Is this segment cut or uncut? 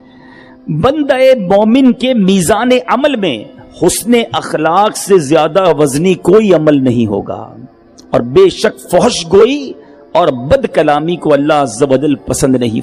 uncut